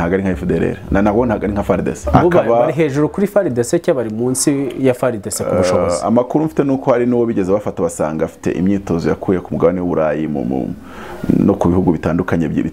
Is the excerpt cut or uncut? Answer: cut